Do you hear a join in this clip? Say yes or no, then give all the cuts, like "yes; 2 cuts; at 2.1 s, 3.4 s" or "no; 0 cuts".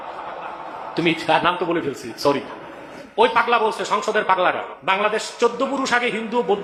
no; 0 cuts